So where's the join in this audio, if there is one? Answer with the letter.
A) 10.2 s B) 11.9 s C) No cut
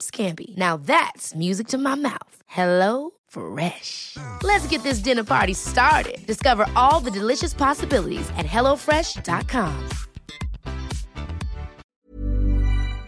B